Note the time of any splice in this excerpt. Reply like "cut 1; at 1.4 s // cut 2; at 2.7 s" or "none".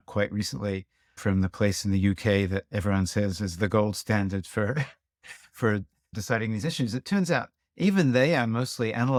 none

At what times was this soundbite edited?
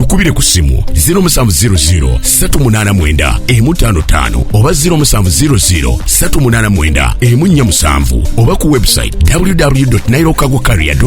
none

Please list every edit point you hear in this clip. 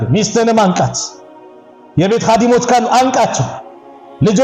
none

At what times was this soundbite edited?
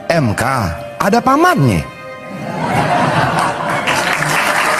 none

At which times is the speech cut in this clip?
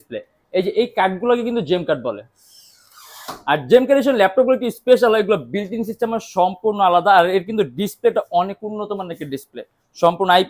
none

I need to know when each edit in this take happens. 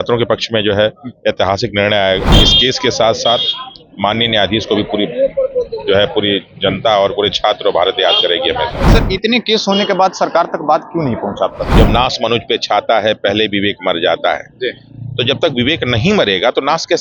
cut 1; at 2.4 s // cut 2; at 8.8 s // cut 3; at 11.7 s

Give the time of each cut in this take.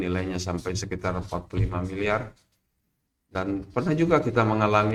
none

